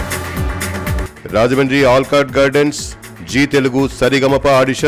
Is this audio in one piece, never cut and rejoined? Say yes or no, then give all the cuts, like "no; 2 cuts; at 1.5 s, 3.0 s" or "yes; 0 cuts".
no; 1 cut; at 0.9 s